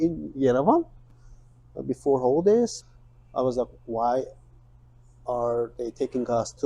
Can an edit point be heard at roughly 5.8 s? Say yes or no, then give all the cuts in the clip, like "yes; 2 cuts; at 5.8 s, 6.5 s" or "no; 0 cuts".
no; 1 cut; at 2.8 s